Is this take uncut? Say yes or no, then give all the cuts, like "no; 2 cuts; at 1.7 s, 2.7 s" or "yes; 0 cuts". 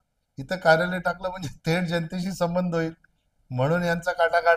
yes; 0 cuts